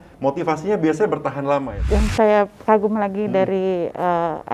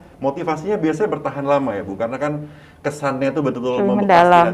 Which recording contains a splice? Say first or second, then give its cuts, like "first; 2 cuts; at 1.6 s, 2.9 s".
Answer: first; 1 cut; at 1.7 s